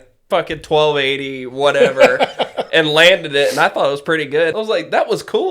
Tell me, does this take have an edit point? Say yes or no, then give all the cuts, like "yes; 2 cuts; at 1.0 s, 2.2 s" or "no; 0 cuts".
yes; 1 cut; at 4.5 s